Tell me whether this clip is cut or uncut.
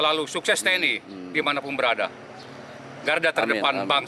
uncut